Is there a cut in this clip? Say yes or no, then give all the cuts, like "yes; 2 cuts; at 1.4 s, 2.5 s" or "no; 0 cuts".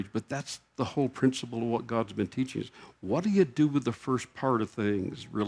no; 0 cuts